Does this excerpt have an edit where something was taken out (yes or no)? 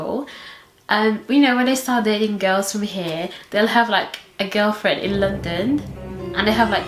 no